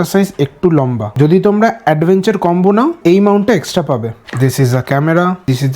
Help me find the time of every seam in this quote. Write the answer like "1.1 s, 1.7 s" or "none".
4.2 s